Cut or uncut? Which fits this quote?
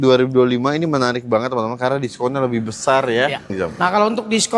cut